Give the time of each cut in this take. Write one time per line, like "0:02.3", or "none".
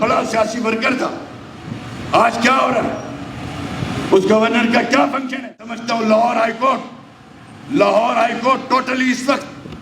0:05.8